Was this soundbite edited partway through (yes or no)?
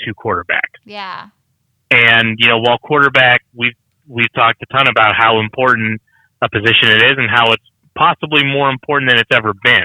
yes